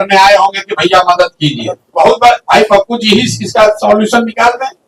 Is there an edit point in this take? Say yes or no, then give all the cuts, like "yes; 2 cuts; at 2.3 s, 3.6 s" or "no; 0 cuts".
yes; 1 cut; at 1.9 s